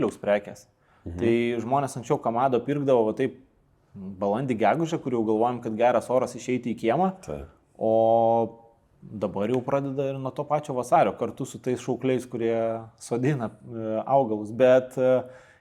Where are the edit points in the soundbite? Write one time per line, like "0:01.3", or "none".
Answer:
none